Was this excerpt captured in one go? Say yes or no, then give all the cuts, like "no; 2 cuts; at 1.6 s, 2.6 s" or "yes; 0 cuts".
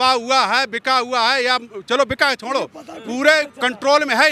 yes; 0 cuts